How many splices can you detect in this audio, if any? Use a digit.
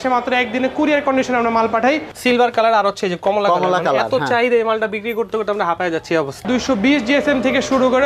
2